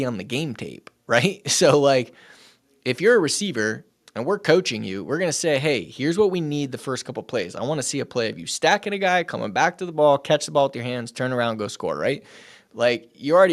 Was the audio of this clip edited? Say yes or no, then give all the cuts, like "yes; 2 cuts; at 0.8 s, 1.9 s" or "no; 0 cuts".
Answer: no; 0 cuts